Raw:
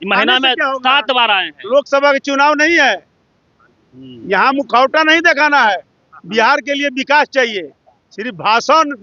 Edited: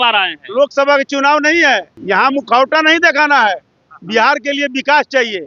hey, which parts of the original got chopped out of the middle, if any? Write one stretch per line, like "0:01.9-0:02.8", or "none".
0:03.1-0:04.1